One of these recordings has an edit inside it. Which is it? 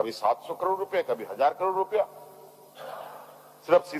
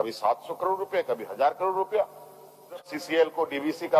second; 1 cut; at 2.9 s

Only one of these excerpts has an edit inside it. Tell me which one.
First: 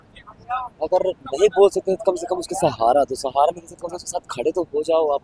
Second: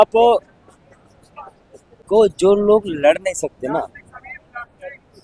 second; 1 cut; at 1.9 s

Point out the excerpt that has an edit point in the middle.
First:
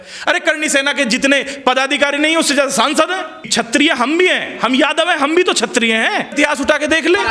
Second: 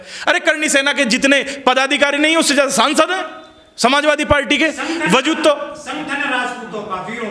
first; 2 cuts; at 3.4 s, 6.3 s

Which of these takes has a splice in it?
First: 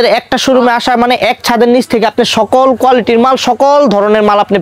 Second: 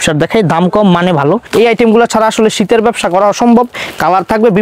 second; 1 cut; at 1.4 s

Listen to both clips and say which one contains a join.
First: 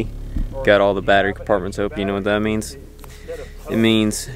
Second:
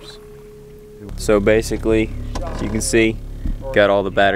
second; 1 cut; at 1.1 s

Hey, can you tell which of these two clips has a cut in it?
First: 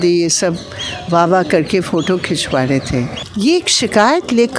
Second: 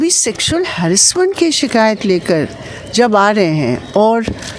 first; 1 cut; at 3.2 s

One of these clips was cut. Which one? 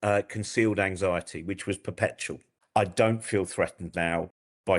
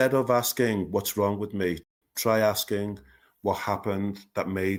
first; 1 cut; at 2.5 s

